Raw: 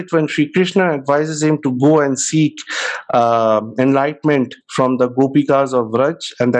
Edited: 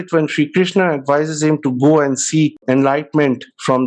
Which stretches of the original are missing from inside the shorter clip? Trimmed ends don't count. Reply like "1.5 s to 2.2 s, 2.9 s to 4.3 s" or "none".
2.6 s to 3.7 s